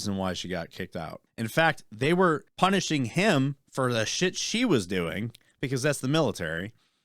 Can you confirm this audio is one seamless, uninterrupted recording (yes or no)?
no